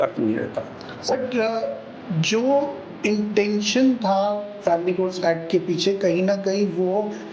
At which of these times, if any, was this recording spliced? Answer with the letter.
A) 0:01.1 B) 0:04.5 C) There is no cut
A